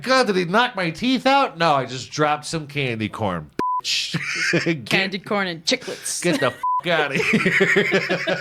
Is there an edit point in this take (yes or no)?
no